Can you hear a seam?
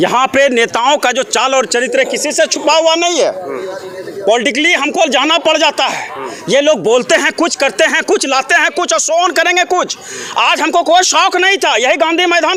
no; 0 cuts

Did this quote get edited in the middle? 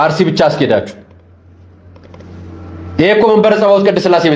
no; 0 cuts

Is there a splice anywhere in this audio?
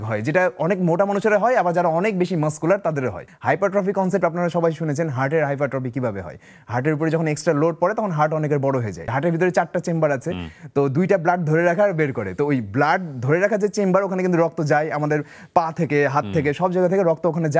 yes; 2 cuts; at 3.2 s, 9.1 s

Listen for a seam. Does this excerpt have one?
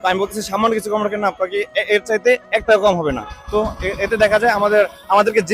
no; 0 cuts

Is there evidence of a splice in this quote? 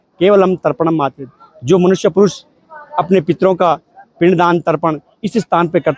no; 0 cuts

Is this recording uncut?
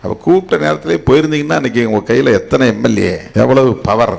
no; 1 cut; at 3.2 s

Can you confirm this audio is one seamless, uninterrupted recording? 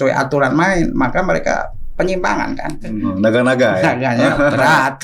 no; 1 cut; at 3.0 s

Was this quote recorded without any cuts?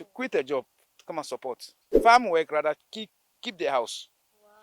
no; 1 cut; at 2.0 s

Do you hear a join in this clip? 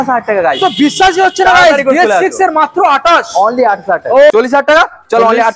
yes; 1 cut; at 4.3 s

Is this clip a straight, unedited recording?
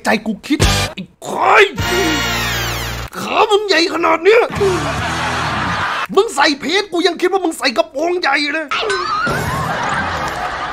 yes; 0 cuts

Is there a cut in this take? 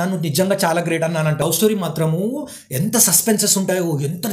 yes; 1 cut; at 1.4 s

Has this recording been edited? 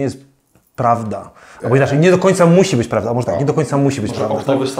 no; 0 cuts

